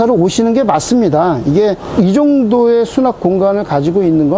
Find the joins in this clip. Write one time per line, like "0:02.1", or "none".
0:01.8